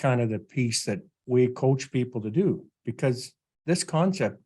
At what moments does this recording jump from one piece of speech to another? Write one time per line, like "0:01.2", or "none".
0:01.1